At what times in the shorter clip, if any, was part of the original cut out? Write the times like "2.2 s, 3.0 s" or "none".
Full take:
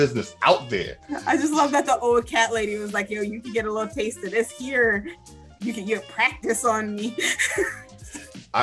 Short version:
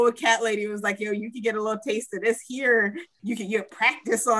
3.1 s